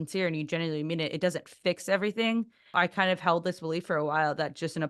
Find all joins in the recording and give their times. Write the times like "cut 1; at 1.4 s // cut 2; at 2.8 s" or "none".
cut 1; at 2.7 s